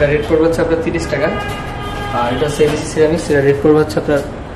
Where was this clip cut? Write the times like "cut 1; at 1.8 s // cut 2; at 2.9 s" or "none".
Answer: none